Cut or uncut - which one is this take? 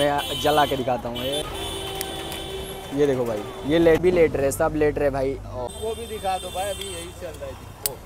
cut